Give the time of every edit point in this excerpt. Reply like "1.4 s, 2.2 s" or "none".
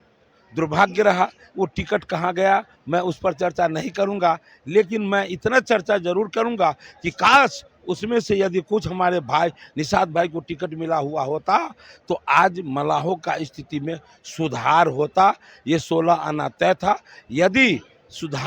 none